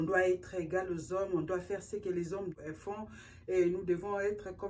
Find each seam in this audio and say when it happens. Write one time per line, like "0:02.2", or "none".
0:02.5